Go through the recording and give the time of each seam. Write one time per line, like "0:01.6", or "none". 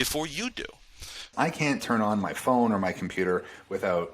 0:01.3